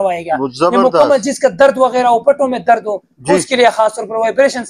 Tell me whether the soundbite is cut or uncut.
uncut